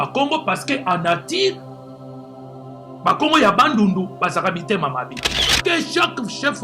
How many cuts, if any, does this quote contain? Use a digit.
1